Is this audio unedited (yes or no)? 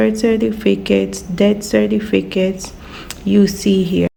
yes